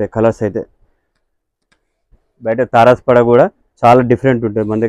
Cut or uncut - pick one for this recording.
cut